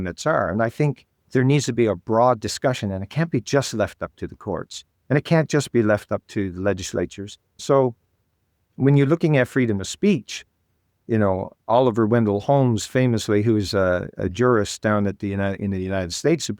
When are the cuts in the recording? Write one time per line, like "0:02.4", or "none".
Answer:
0:07.6